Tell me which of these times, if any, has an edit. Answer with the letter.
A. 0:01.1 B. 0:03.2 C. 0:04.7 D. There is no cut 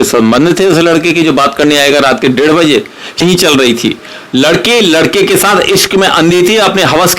B